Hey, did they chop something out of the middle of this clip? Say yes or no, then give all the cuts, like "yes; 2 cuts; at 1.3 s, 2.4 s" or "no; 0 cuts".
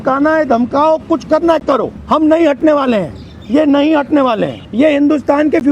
yes; 2 cuts; at 1.9 s, 4.6 s